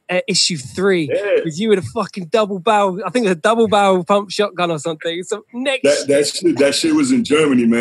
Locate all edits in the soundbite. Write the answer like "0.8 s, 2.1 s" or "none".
none

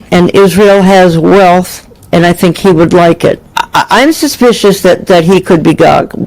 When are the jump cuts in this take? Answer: 3.5 s

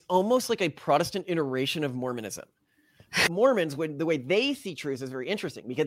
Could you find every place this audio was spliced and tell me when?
3.3 s

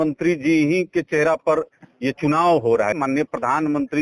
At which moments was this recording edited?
3.0 s

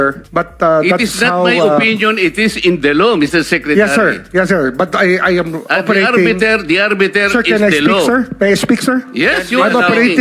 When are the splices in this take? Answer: none

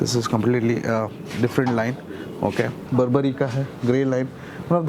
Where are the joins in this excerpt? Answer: 2.8 s

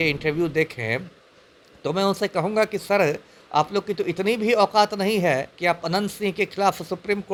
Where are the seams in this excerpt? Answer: none

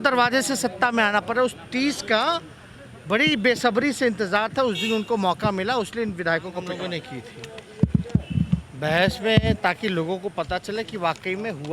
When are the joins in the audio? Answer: 6.8 s

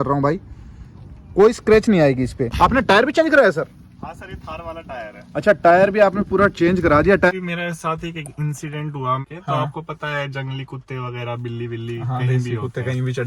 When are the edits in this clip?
2.4 s, 7.3 s, 9.2 s

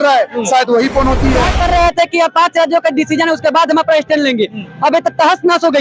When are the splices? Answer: 1.5 s

